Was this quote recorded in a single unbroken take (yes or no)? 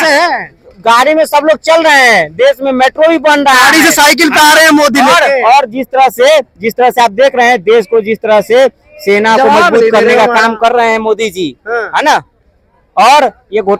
yes